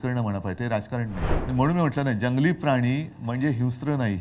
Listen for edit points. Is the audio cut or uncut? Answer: cut